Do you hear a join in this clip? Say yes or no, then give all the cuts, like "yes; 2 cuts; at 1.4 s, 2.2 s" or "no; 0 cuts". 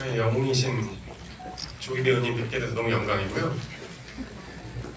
no; 0 cuts